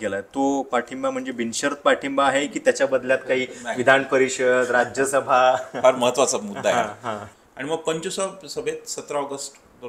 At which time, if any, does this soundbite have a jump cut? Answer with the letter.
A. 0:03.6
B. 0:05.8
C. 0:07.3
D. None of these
C